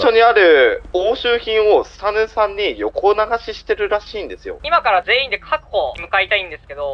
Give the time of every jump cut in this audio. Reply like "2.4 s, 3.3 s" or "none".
4.5 s, 6.0 s